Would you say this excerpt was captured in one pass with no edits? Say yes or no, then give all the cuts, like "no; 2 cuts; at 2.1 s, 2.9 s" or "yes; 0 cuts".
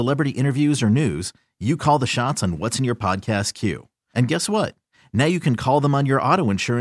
yes; 0 cuts